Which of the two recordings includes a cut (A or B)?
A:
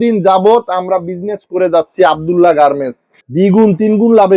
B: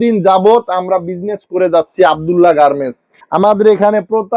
A